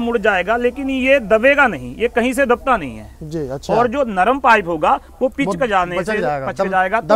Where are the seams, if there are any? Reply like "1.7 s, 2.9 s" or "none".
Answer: none